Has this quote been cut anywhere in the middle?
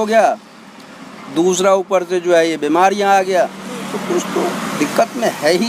no; 0 cuts

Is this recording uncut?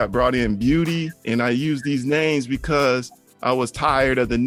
yes; 0 cuts

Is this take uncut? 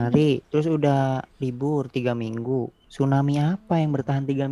no; 2 cuts; at 1.3 s, 2.8 s

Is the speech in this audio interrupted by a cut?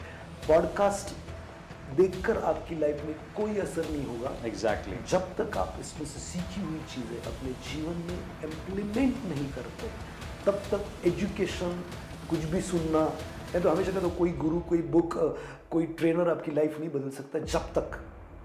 no; 0 cuts

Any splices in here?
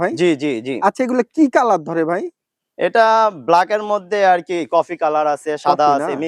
no; 0 cuts

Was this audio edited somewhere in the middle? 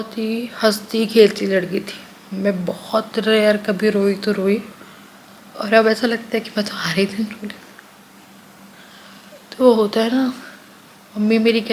no; 0 cuts

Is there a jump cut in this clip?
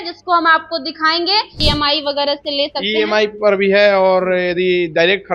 yes; 1 cut; at 1.6 s

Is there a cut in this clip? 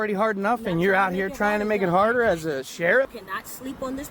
yes; 1 cut; at 3.2 s

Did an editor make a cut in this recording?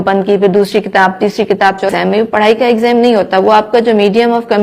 yes; 1 cut; at 1.9 s

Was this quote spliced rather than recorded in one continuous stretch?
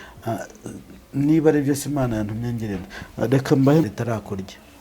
yes; 1 cut; at 3.8 s

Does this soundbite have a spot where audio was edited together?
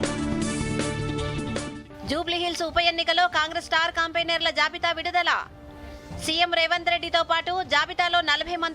yes; 1 cut; at 1.7 s

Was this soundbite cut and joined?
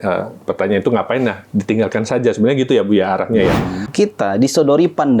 yes; 1 cut; at 3.8 s

